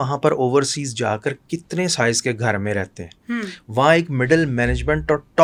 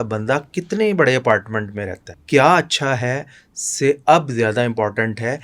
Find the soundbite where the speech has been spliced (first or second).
second